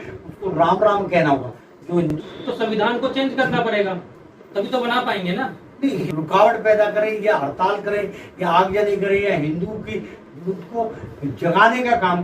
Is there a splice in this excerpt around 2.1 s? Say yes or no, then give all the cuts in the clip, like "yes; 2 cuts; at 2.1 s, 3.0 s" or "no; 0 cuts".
yes; 3 cuts; at 2.1 s, 6.0 s, 10.2 s